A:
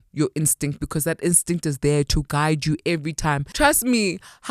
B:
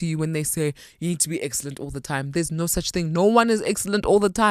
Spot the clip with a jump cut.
A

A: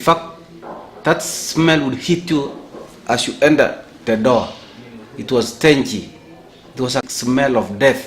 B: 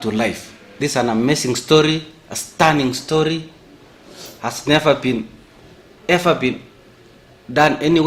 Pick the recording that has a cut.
A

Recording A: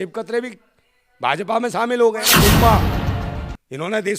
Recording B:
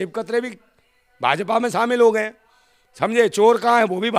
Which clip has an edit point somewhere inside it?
A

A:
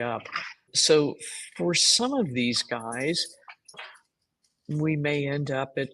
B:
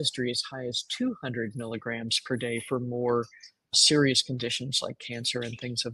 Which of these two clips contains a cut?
A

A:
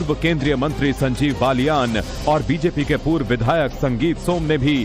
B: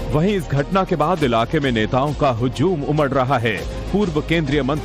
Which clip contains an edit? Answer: A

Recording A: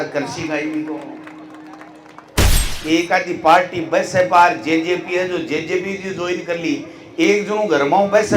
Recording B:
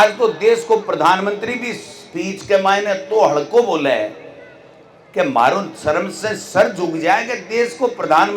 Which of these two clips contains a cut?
A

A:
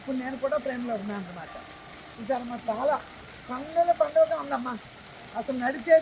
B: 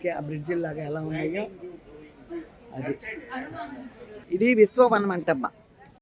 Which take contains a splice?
B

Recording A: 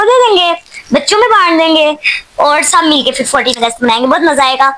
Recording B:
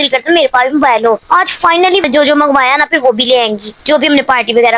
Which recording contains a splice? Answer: B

